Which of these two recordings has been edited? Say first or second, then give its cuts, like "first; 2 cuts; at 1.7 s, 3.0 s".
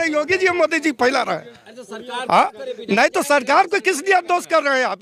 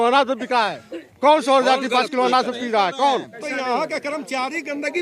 second; 1 cut; at 3.4 s